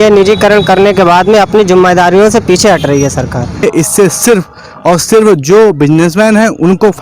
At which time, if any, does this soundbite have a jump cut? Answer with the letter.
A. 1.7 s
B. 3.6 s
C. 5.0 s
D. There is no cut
B